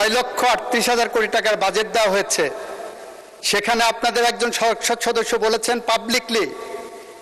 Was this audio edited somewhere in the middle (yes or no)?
no